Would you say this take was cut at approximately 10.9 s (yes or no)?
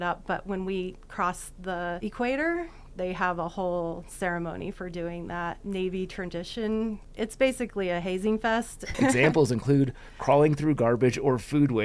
no